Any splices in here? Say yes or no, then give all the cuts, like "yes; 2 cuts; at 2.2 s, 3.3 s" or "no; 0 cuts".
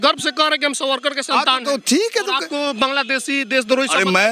no; 0 cuts